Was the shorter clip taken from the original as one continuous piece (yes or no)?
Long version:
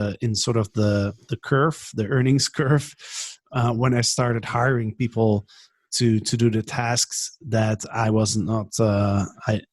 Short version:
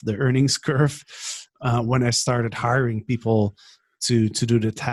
yes